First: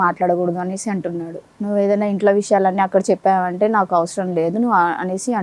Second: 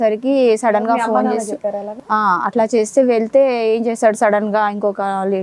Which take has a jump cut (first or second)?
first